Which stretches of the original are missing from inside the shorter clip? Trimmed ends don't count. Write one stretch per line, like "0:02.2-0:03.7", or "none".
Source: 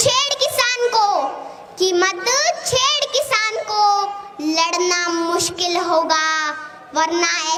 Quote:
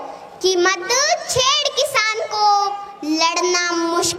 none

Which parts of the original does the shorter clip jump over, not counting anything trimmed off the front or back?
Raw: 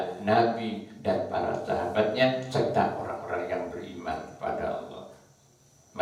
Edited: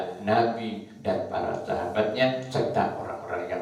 none

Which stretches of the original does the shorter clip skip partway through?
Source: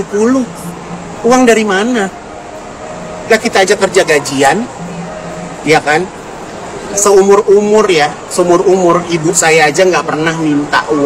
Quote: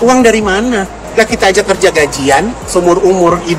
0:02.2-0:03.1
0:04.7-0:08.2

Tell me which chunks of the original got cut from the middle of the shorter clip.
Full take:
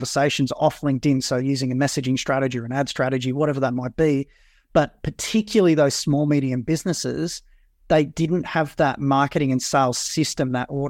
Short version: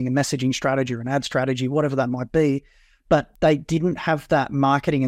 0:04.9-0:07.8

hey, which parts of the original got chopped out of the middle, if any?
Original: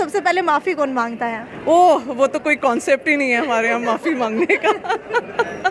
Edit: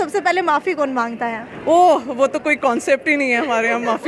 none

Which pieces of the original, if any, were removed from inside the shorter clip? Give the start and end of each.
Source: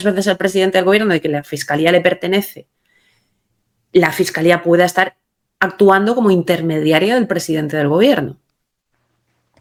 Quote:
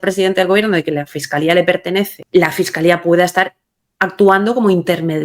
0:02.6-0:03.8

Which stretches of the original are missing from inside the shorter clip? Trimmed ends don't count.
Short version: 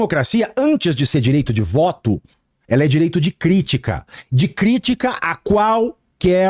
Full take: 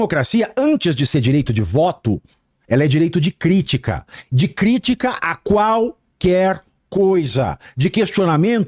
none

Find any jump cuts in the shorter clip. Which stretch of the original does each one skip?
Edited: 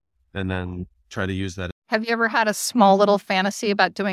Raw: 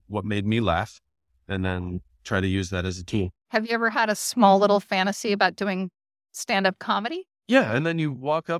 0:02.9-0:03.4

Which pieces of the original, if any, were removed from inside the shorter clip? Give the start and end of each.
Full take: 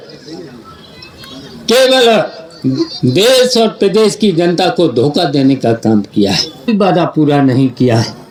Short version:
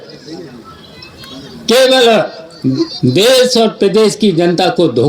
none

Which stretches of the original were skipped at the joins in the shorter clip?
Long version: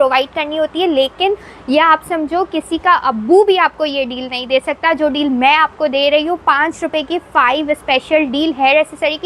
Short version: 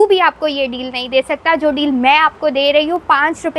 none

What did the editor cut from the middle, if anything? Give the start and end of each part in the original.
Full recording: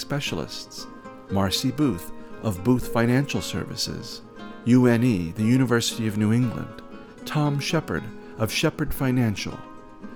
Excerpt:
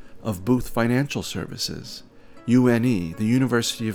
none

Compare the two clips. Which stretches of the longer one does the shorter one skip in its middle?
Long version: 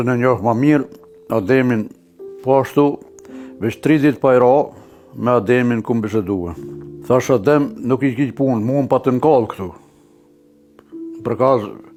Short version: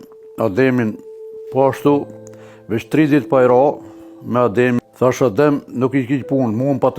0:05.7-0:06.9

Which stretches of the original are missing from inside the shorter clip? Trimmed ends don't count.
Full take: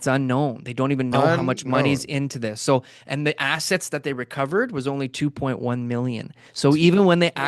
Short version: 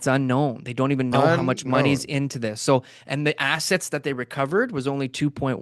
none

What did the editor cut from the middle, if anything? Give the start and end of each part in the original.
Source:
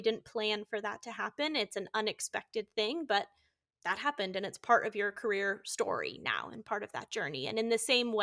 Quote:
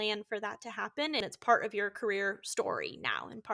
0:01.6-0:04.4

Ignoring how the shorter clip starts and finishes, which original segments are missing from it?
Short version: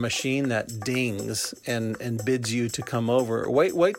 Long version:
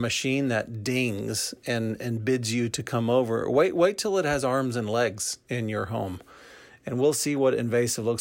none

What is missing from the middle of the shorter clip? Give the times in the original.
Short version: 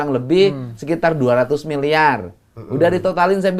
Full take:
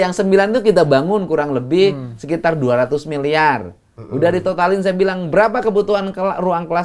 none

